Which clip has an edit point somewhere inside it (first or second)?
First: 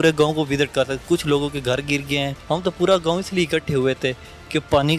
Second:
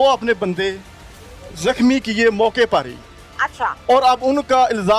first